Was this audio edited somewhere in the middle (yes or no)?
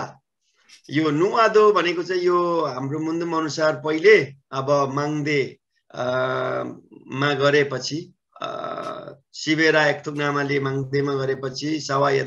no